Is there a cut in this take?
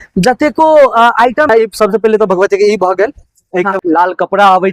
yes; 2 cuts; at 1.5 s, 3.7 s

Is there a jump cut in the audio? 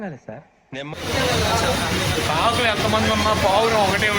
yes; 1 cut; at 0.9 s

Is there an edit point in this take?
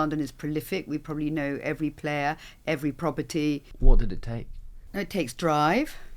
yes; 1 cut; at 3.7 s

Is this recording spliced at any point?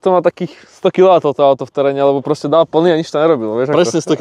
no; 0 cuts

